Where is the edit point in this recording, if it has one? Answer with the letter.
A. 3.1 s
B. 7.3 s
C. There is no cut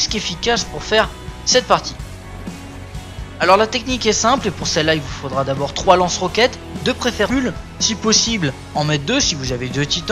C